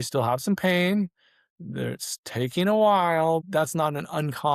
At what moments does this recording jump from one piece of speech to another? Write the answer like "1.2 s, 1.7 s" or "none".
3.5 s